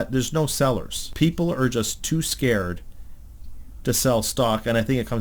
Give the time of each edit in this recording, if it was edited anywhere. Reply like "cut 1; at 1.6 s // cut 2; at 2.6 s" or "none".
cut 1; at 1.0 s